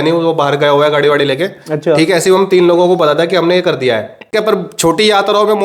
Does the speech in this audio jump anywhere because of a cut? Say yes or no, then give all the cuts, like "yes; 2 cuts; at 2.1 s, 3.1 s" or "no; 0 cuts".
yes; 1 cut; at 4.3 s